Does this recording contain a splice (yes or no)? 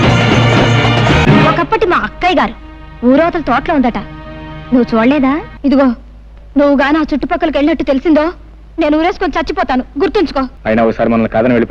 yes